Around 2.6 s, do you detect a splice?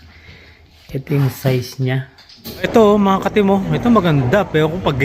yes; 1 cut; at 2.6 s

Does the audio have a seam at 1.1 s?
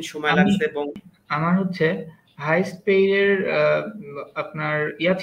yes; 1 cut; at 1.1 s

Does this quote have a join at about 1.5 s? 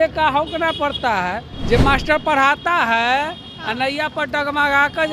yes; 1 cut; at 1.5 s

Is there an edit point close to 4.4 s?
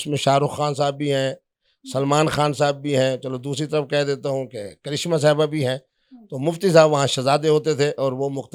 no; 0 cuts

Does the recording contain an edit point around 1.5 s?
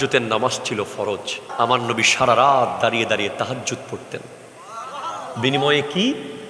yes; 1 cut; at 1.5 s

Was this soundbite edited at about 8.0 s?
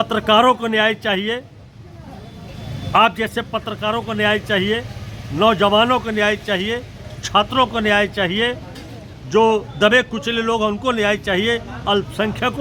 no; 0 cuts

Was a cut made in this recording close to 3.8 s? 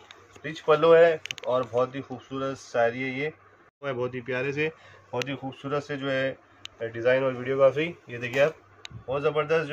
yes; 1 cut; at 3.8 s

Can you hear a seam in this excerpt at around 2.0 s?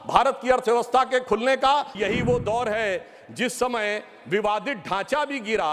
yes; 1 cut; at 2.0 s

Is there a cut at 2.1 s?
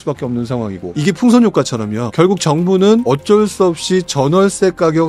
yes; 3 cuts; at 0.9 s, 2.1 s, 3.0 s

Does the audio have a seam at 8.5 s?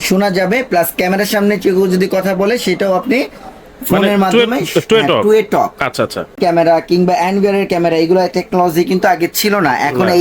no; 1 cut; at 6.4 s

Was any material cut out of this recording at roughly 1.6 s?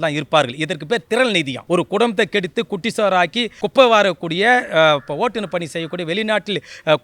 yes; 2 cuts; at 1.6 s, 3.6 s

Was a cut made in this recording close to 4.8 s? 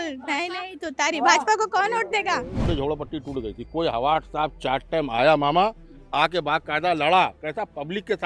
no; 1 cut; at 2.6 s

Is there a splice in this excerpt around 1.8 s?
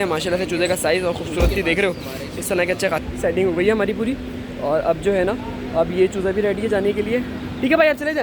no; 1 cut; at 3.0 s

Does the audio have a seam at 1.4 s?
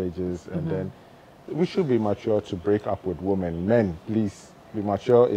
yes; 1 cut; at 1.4 s

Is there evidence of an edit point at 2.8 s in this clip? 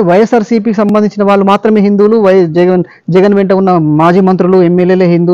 no; 0 cuts

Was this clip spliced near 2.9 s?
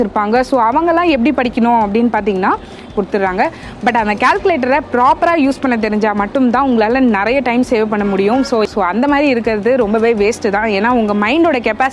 yes; 2 cuts; at 2.9 s, 8.7 s

